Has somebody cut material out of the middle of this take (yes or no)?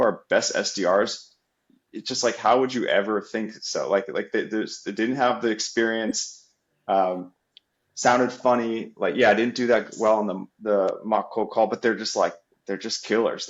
no